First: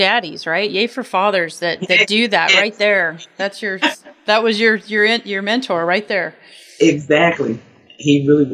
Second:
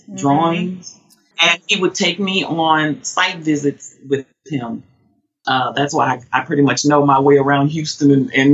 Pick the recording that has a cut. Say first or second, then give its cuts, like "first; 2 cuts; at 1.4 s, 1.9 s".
second; 1 cut; at 1.2 s